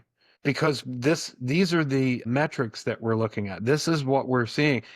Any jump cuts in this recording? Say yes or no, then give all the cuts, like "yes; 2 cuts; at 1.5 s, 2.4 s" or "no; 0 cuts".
yes; 1 cut; at 2.2 s